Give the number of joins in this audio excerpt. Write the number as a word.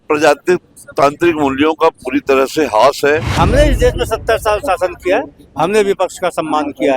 one